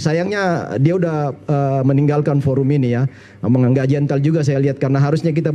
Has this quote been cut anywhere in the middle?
no; 0 cuts

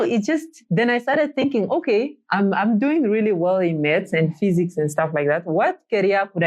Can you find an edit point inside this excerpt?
no; 0 cuts

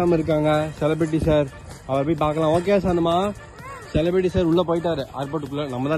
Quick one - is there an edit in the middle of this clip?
no; 0 cuts

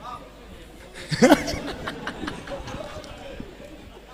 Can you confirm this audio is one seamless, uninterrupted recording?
yes; 0 cuts

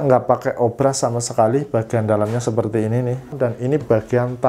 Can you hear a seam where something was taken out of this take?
yes; 1 cut; at 3.3 s

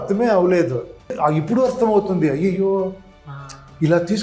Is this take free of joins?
no; 1 cut; at 1.1 s

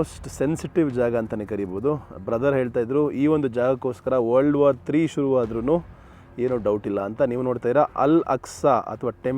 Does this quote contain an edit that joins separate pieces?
no; 0 cuts

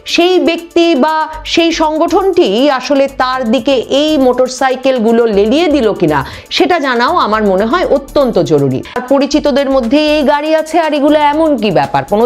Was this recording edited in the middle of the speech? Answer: yes; 1 cut; at 9.0 s

